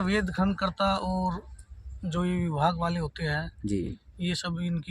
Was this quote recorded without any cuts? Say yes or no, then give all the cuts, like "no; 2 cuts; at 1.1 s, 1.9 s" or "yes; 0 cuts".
yes; 0 cuts